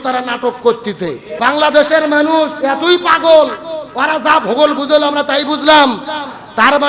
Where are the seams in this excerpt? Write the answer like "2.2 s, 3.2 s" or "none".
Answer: 1.2 s